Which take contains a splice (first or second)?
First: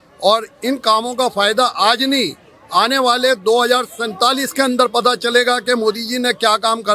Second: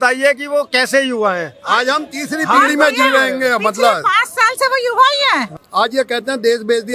second